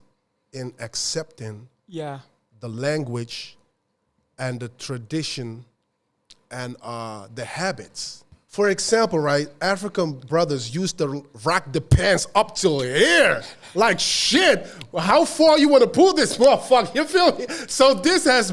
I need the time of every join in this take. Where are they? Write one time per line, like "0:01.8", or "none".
0:08.3